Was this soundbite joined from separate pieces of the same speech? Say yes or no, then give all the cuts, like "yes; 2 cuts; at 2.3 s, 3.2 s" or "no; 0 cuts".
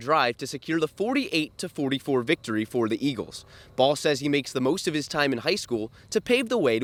no; 0 cuts